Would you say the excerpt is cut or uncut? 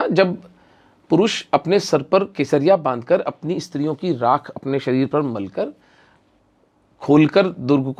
uncut